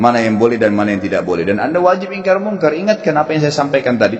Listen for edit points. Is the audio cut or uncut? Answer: uncut